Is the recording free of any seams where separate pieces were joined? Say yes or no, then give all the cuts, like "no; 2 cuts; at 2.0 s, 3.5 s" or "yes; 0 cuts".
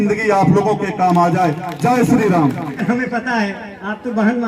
yes; 0 cuts